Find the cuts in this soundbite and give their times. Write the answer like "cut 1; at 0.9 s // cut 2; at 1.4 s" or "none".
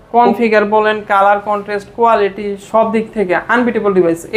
none